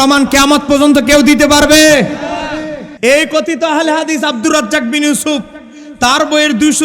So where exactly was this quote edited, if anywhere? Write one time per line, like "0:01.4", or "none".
0:02.8